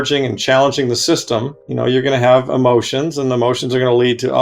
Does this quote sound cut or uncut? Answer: cut